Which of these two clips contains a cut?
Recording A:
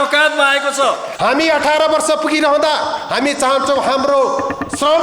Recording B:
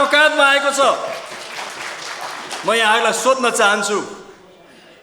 A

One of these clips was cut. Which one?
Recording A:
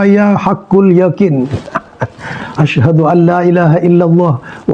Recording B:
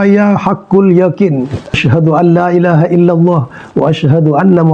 B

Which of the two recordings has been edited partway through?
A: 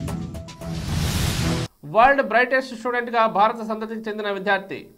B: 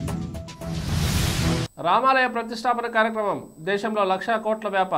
A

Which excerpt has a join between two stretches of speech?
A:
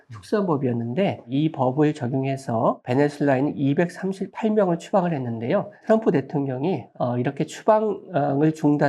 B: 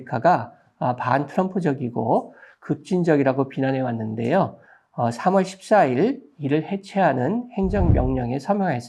A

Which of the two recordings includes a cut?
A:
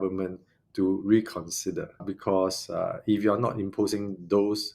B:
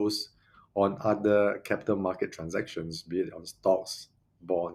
A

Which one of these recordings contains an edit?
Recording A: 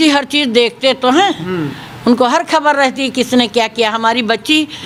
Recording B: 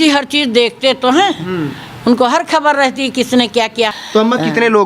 B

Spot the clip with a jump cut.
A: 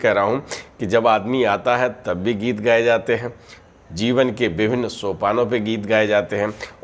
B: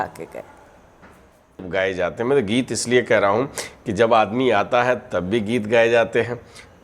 B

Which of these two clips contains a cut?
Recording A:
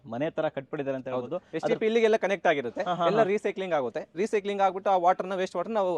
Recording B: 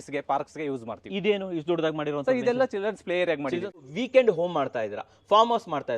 B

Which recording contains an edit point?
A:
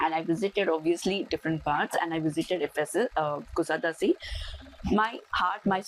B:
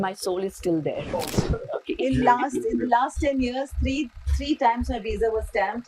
B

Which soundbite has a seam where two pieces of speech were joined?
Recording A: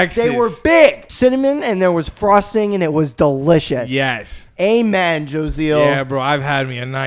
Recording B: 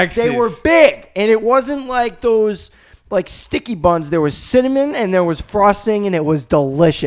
A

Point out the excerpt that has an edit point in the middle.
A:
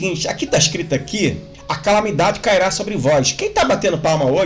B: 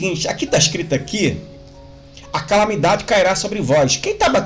A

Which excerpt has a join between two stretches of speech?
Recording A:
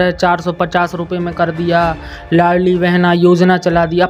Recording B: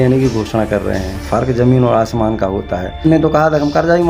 B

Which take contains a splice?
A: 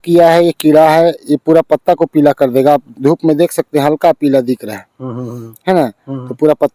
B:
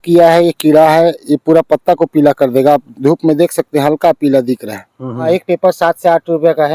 B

